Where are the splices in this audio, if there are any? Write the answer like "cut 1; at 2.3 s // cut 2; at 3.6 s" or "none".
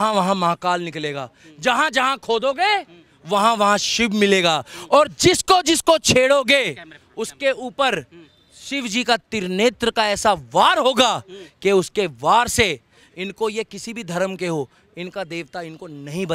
none